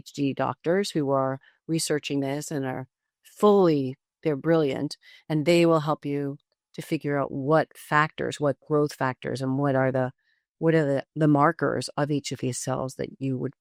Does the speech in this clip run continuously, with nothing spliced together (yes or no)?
yes